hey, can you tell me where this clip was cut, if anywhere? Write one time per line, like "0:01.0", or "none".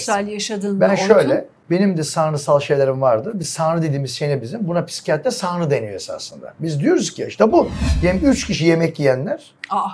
0:01.5
0:07.8